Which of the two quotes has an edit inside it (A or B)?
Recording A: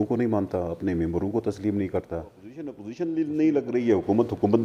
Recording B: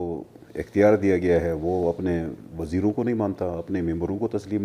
A